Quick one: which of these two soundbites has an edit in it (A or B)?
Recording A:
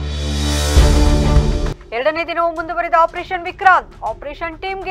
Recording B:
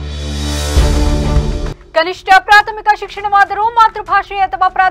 B